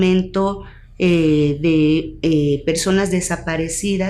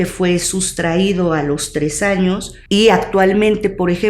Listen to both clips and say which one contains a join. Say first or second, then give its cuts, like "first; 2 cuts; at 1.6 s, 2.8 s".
second; 1 cut; at 2.5 s